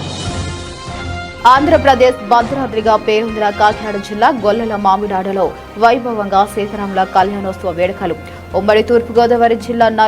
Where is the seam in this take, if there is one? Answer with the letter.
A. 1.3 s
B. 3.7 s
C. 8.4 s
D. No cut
A